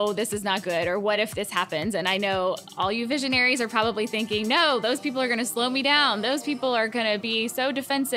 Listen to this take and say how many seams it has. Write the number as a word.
zero